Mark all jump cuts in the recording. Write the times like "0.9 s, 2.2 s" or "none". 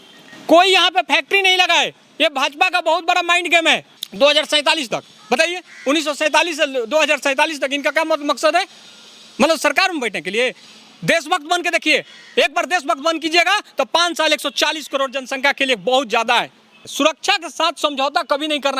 4.0 s, 16.8 s